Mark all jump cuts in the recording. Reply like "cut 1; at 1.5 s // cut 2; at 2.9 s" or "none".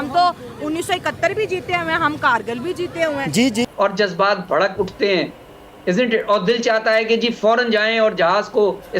cut 1; at 3.7 s